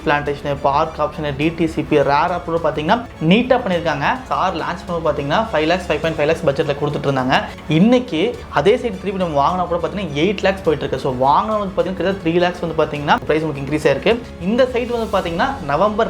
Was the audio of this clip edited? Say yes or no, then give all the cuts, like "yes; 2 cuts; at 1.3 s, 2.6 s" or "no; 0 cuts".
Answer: yes; 2 cuts; at 4.3 s, 14.3 s